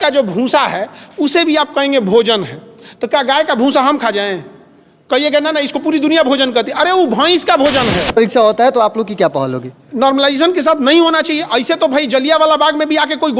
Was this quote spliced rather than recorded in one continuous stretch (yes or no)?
yes